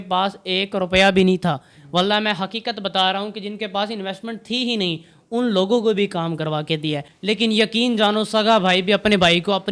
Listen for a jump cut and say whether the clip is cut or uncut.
cut